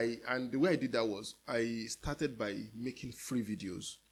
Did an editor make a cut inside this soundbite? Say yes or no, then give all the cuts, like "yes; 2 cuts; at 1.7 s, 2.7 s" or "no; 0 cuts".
no; 0 cuts